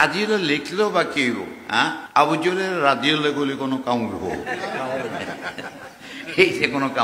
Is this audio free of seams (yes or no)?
no